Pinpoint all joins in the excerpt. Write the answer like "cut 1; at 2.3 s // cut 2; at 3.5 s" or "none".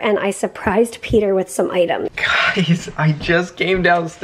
cut 1; at 2.1 s